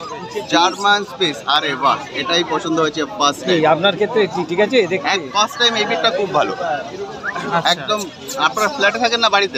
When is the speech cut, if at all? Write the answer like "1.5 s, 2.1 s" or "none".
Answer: none